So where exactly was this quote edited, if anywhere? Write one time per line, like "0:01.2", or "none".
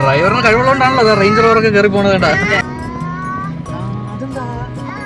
0:02.6

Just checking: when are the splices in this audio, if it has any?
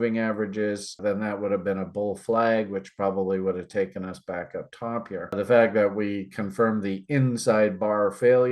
0:01.0
0:05.3

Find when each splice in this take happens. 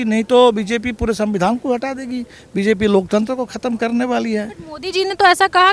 none

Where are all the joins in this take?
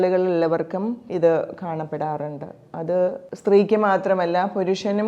0:01.0
0:03.3

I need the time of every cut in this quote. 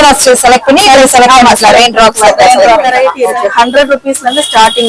0:02.9

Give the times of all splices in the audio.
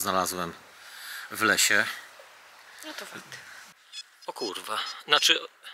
0:03.6

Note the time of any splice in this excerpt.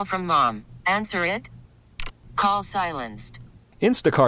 none

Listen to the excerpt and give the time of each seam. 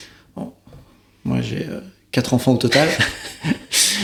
none

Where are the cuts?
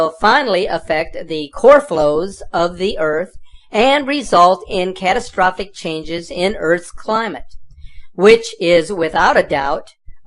0:06.9

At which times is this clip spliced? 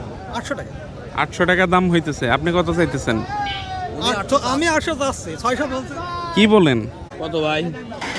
0:07.0

